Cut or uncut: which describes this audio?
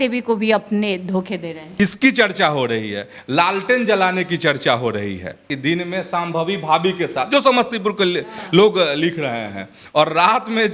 cut